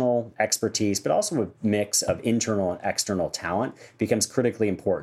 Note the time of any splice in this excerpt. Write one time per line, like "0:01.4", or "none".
0:01.5

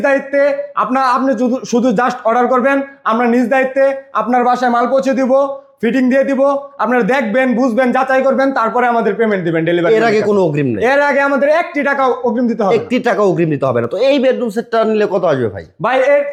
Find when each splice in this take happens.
none

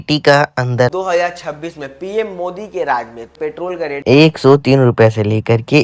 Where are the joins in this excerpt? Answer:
0:00.9
0:03.3

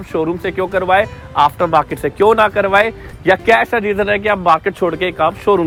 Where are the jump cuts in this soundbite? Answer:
none

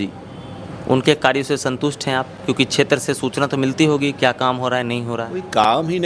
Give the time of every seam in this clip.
none

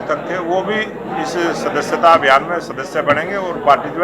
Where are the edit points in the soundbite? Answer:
none

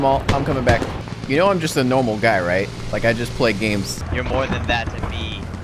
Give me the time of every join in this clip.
0:01.0
0:02.8
0:04.1

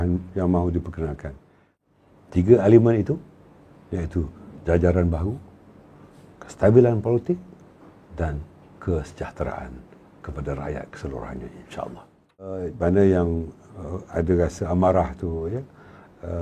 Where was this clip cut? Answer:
0:01.8
0:12.6

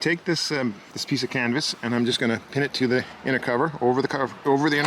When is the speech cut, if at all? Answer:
0:00.9

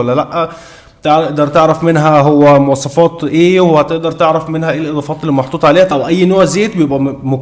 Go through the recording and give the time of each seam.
0:05.9

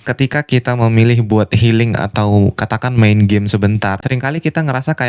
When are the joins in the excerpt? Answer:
0:04.0

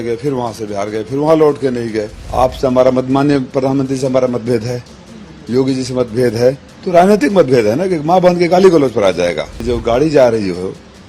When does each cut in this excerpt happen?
0:02.2
0:09.5

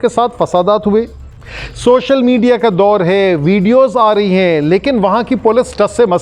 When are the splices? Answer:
none

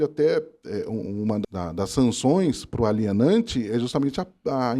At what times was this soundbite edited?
0:01.4

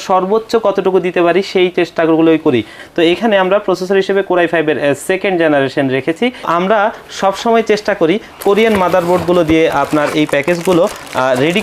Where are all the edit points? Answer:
0:02.8
0:06.5

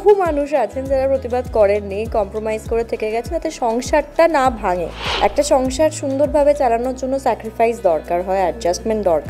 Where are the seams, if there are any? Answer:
0:05.0

